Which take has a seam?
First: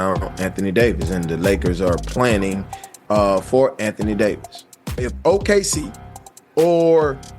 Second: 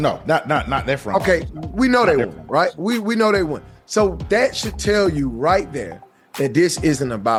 first; 1 cut; at 5.1 s

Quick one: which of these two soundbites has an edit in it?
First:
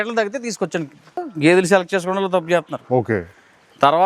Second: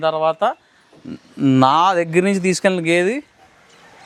first; 1 cut; at 1.2 s

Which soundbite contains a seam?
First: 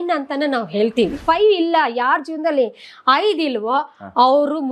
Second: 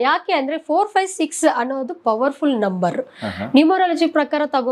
first; 1 cut; at 1.2 s

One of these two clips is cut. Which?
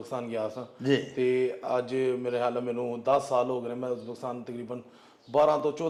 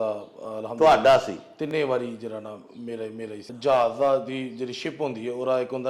second; 1 cut; at 3.4 s

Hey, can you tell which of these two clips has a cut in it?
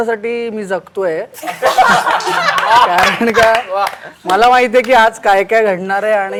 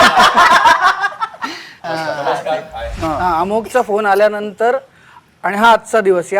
second; 2 cuts; at 1.8 s, 3.0 s

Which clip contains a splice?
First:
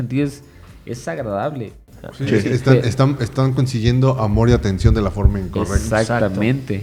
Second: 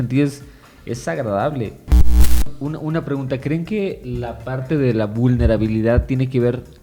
second; 1 cut; at 2.2 s

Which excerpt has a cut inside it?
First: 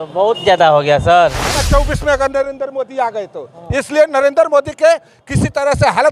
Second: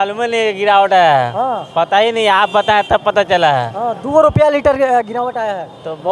first; 1 cut; at 1.6 s

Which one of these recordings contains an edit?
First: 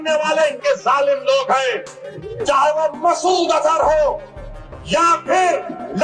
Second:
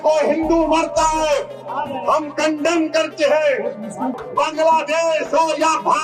second; 1 cut; at 4.1 s

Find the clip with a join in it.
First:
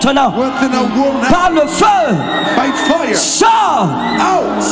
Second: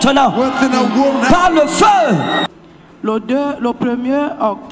second; 1 cut; at 2.5 s

